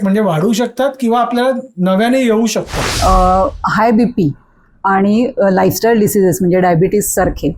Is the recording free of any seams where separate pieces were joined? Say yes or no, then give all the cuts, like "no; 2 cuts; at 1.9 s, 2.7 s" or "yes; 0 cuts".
no; 1 cut; at 2.8 s